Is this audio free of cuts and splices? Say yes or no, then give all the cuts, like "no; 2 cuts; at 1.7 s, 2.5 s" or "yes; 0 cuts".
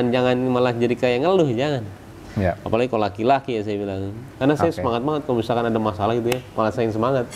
no; 1 cut; at 4.3 s